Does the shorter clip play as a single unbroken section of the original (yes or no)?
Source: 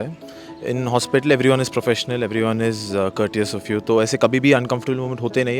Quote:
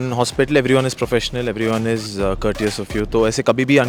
yes